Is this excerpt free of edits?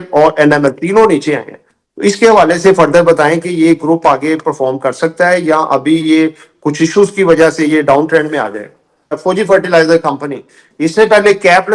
no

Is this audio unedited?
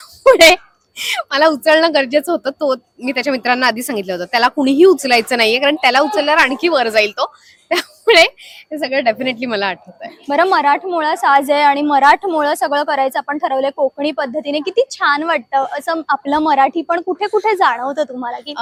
yes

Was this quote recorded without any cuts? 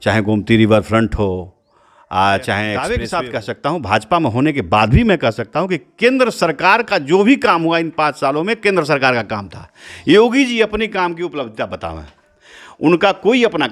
no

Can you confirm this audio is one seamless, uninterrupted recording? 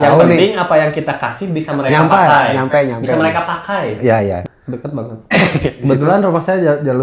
no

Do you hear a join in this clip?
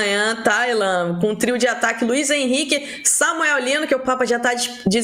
no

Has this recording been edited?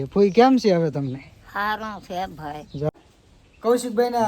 yes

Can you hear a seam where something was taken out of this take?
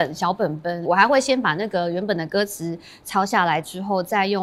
no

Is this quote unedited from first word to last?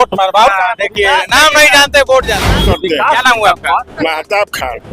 no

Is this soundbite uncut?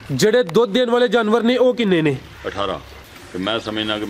no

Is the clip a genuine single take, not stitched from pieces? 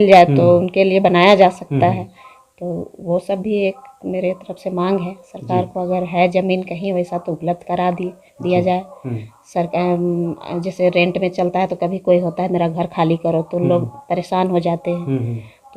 yes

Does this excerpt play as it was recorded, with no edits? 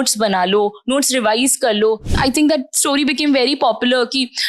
no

